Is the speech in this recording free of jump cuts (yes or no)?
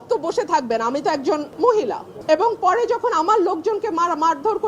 no